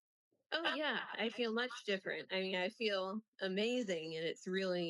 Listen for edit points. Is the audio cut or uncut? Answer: uncut